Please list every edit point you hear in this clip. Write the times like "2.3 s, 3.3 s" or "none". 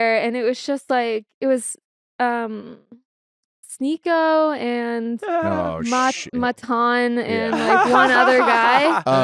none